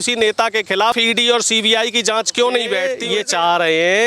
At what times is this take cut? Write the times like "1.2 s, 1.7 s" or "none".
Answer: 1.0 s, 2.9 s